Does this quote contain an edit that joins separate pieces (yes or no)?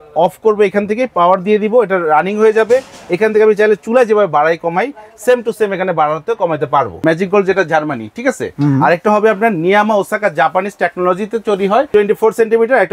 yes